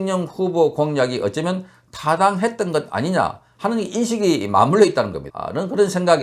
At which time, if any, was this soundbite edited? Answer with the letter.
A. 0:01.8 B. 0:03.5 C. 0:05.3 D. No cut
C